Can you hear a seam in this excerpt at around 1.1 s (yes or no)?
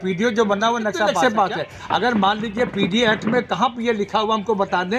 yes